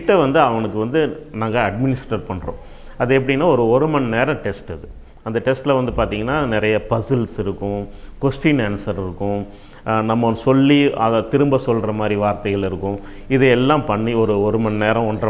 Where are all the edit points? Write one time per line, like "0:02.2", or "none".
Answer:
none